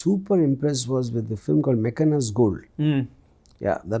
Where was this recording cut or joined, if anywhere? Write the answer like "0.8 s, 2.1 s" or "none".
none